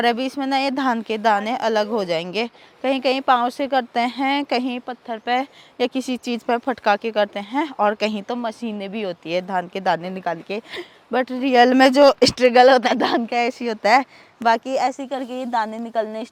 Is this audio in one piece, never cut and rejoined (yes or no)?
yes